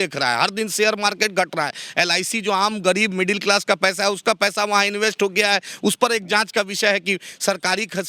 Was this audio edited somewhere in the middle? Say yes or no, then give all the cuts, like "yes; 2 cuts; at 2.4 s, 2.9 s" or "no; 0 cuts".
no; 0 cuts